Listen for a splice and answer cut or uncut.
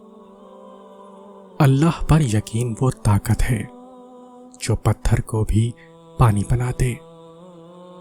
cut